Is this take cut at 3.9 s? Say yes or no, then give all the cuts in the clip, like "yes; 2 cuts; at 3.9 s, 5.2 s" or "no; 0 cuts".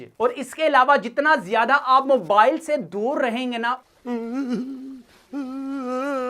yes; 1 cut; at 3.9 s